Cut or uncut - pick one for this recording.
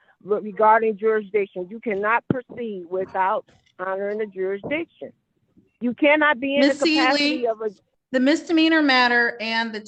uncut